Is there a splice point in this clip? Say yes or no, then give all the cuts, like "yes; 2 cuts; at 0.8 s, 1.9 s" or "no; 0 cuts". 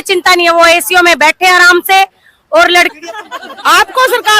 yes; 1 cut; at 2.9 s